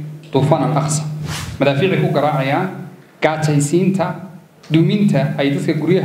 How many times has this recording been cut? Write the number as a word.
one